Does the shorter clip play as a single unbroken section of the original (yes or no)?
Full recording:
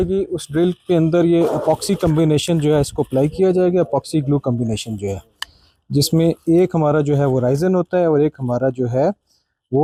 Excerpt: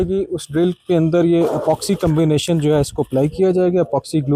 yes